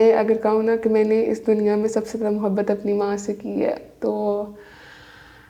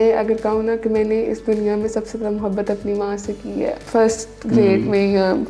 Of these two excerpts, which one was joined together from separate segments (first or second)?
second